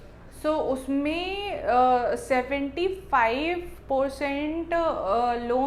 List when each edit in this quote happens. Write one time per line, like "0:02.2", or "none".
none